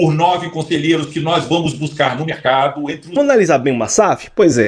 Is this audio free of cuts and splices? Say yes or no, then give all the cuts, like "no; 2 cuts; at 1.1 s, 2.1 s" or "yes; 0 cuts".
no; 1 cut; at 3.2 s